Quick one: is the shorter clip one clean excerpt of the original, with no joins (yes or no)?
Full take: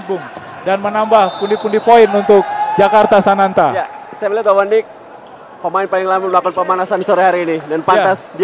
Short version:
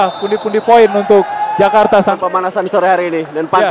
no